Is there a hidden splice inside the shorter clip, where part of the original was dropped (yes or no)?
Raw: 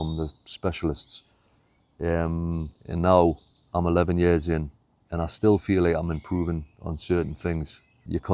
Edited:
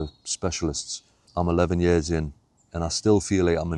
yes